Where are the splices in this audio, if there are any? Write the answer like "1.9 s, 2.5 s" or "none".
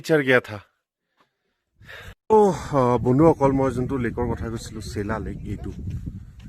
2.0 s